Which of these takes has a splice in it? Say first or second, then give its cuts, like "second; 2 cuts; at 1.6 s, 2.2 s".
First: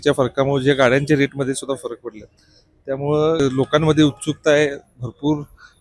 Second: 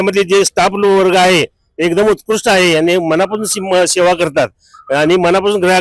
first; 1 cut; at 3.4 s